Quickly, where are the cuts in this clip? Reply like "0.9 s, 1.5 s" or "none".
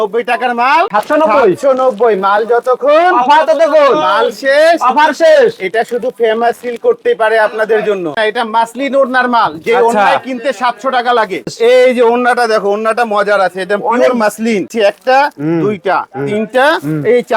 0.9 s, 8.2 s, 11.5 s, 14.7 s